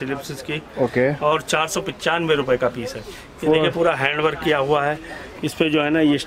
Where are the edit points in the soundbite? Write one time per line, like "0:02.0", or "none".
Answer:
none